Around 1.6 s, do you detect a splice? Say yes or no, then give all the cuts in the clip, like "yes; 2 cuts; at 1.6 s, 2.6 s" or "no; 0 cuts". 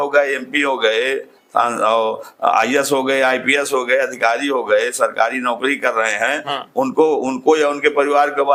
no; 0 cuts